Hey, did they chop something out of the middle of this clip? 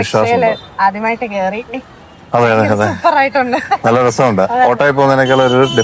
no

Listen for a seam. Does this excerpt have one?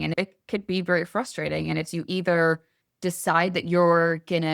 no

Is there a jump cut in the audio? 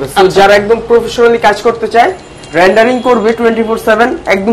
no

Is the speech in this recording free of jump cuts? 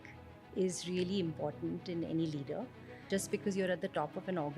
no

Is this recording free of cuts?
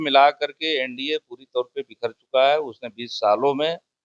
yes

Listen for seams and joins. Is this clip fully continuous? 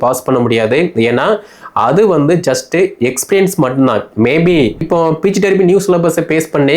no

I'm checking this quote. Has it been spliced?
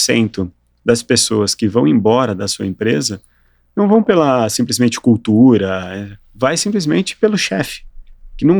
no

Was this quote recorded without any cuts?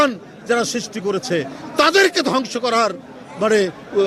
yes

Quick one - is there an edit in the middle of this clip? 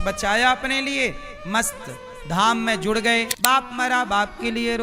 yes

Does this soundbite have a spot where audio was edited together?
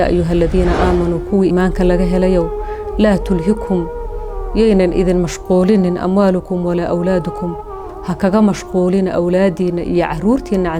yes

